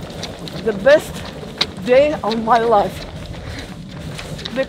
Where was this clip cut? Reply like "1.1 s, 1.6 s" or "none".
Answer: 3.7 s